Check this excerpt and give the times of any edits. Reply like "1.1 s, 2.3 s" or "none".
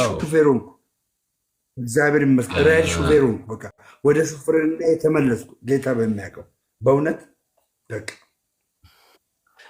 none